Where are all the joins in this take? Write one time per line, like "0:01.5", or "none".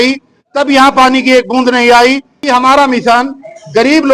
0:02.3